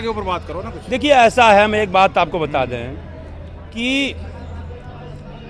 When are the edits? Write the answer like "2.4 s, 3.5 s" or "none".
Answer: none

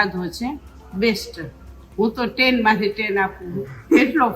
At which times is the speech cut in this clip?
none

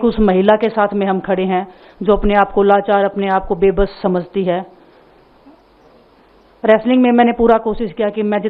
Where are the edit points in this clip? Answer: none

